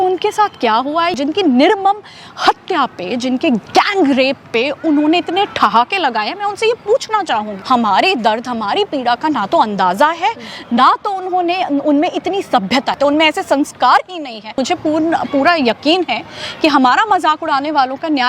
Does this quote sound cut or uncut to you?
cut